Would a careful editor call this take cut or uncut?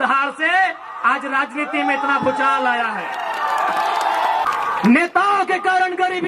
cut